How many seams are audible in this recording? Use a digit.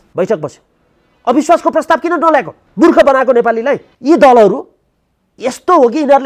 2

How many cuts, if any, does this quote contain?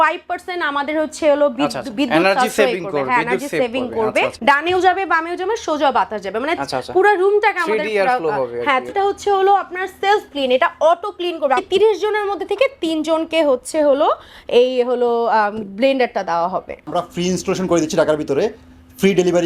4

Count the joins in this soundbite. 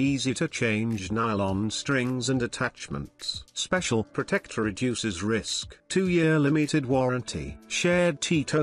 0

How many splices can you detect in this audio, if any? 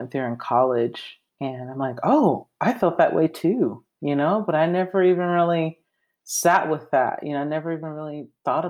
0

